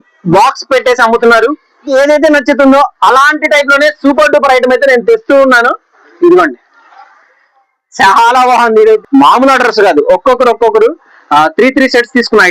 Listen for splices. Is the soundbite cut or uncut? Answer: cut